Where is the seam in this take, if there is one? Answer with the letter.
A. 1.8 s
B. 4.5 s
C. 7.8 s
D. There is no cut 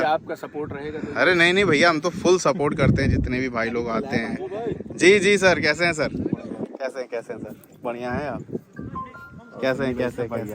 D